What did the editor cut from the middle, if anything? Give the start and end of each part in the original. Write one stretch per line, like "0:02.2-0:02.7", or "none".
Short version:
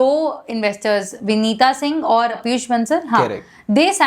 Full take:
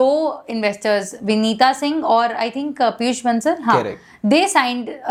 0:02.4-0:02.9